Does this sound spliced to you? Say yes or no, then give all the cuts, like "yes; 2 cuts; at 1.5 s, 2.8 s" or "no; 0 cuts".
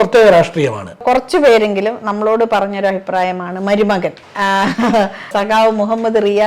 yes; 1 cut; at 1.0 s